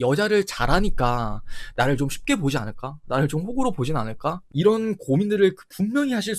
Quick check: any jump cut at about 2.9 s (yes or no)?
no